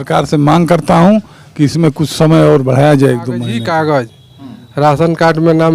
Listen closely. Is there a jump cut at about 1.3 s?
no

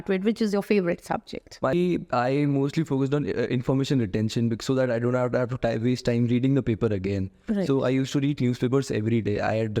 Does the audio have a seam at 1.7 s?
yes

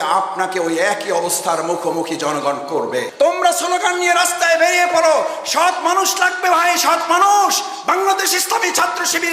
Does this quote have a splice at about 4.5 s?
no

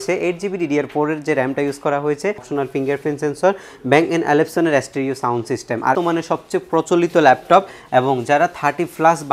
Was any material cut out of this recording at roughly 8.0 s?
no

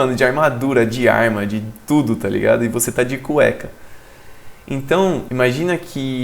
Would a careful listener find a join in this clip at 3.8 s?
no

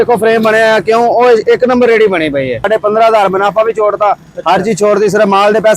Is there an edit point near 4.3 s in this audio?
no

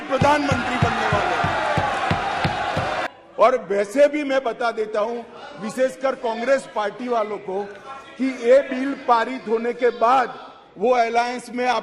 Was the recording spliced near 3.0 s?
yes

